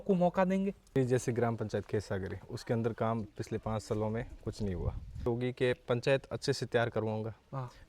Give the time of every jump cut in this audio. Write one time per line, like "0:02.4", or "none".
0:00.9
0:05.3